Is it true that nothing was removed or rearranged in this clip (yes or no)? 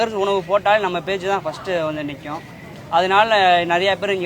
yes